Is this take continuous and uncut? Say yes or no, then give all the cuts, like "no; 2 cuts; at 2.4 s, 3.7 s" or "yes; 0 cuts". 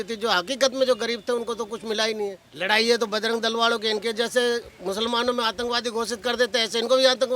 no; 1 cut; at 2.5 s